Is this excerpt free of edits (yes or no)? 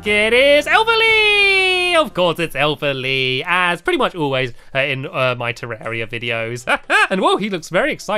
no